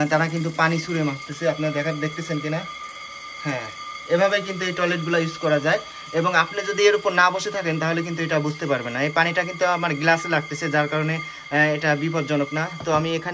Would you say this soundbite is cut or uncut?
uncut